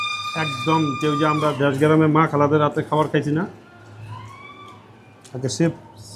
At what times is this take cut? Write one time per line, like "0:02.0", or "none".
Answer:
none